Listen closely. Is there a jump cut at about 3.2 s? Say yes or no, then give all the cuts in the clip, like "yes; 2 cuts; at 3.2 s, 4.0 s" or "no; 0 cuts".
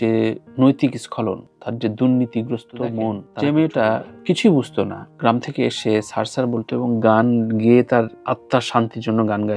yes; 1 cut; at 3.2 s